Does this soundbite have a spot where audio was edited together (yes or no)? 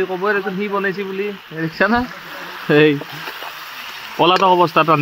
no